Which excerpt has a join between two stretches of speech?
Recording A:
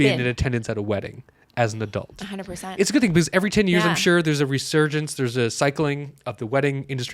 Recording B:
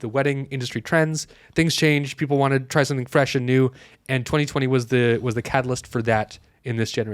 A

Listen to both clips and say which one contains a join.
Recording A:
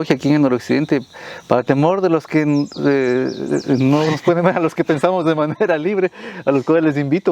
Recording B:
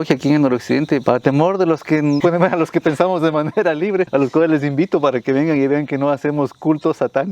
B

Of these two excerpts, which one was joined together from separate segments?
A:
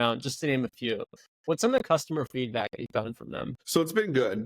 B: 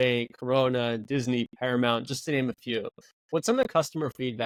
A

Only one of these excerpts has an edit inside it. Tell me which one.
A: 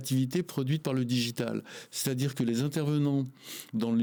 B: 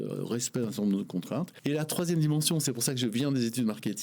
B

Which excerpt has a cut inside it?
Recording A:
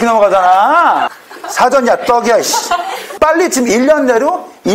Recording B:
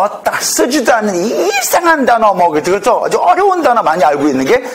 A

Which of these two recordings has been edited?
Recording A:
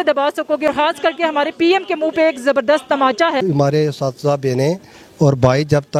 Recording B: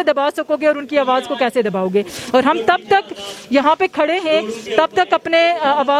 A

